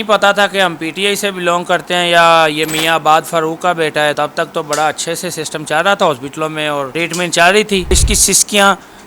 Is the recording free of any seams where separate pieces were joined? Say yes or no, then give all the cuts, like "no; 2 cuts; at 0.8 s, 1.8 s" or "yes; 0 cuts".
no; 3 cuts; at 4.1 s, 6.9 s, 7.9 s